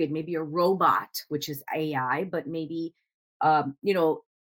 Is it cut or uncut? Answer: uncut